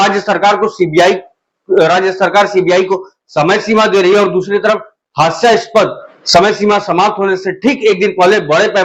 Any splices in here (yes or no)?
no